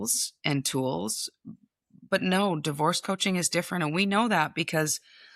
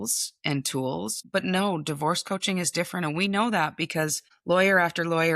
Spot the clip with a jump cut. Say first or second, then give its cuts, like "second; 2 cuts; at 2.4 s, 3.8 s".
second; 2 cuts; at 1.2 s, 4.3 s